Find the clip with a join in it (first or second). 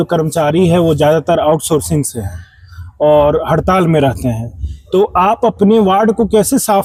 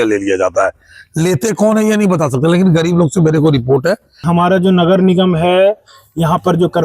second